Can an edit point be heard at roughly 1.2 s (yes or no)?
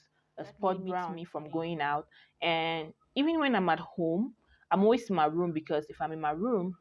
yes